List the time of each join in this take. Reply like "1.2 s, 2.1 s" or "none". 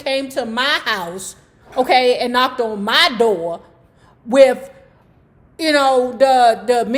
none